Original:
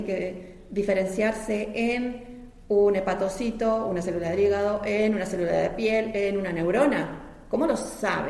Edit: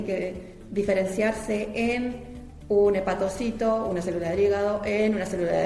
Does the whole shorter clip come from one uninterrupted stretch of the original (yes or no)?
yes